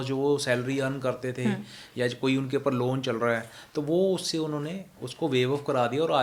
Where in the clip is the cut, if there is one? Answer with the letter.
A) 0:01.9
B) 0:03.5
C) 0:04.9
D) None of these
D